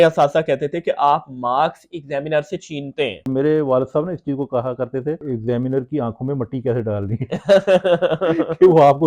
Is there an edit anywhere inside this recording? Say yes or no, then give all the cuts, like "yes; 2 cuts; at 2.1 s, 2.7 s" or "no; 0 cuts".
yes; 1 cut; at 3.2 s